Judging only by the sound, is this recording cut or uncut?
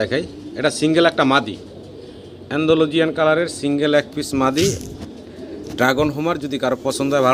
uncut